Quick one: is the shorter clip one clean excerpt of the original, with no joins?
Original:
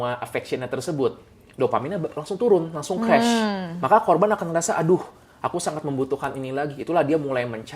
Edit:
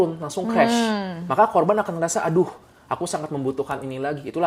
yes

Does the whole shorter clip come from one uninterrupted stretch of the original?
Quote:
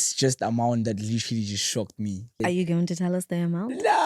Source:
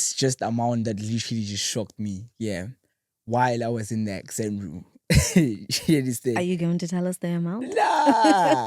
no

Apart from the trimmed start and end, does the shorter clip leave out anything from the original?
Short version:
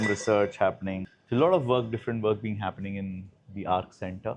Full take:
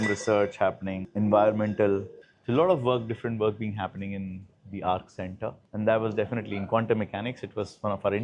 yes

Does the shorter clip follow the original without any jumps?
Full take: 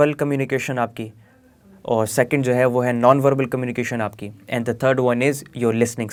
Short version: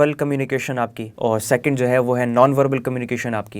no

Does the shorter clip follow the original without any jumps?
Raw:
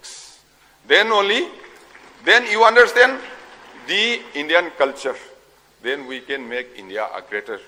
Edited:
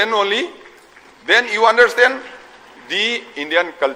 yes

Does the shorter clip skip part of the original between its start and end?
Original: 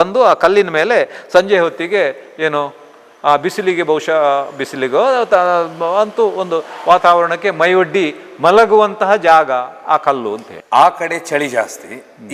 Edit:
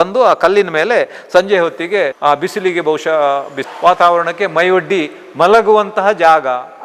yes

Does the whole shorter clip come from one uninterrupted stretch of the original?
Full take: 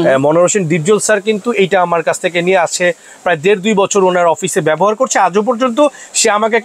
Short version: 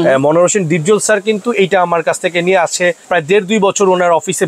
no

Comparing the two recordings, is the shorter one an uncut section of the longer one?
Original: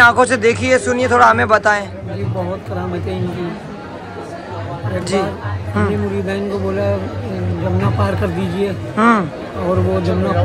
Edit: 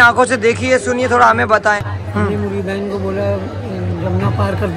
no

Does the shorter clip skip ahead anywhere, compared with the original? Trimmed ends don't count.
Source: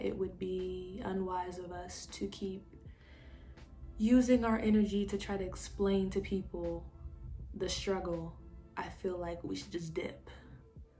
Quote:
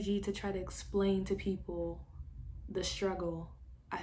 no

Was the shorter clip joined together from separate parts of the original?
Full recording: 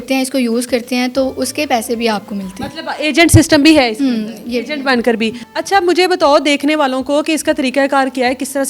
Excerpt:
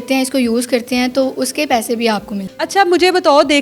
yes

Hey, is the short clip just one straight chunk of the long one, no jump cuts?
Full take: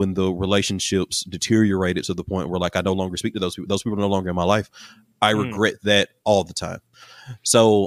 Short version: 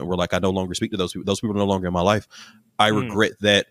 yes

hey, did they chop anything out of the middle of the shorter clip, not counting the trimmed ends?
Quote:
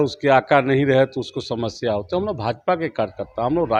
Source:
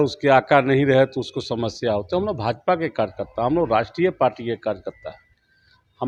no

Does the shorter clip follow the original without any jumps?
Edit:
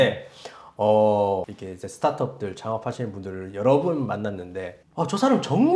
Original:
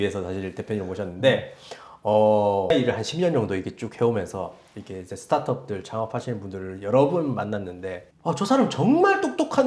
no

